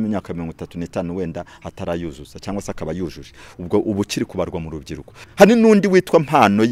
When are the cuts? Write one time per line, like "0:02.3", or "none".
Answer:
0:05.1